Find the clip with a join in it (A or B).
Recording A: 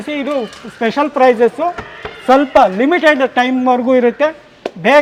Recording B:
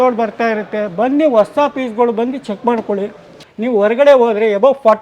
B